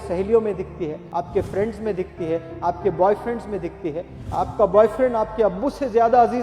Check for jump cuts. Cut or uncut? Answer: cut